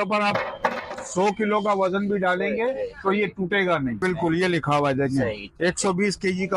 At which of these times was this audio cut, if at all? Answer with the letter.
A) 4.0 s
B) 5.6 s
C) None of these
A